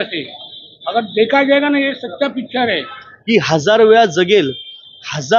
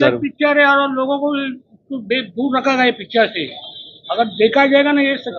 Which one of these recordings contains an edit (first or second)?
first